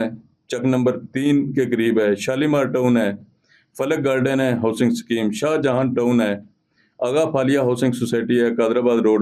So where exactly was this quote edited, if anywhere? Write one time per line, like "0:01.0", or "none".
none

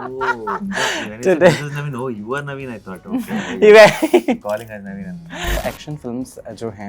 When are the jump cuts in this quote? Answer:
0:05.6

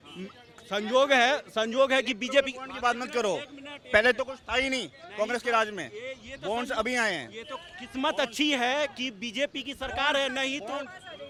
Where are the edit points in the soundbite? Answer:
none

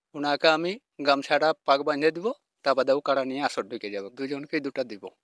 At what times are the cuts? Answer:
none

